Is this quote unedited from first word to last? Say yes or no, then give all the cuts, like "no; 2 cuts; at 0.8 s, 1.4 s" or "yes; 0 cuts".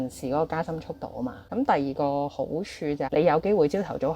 no; 2 cuts; at 1.4 s, 3.1 s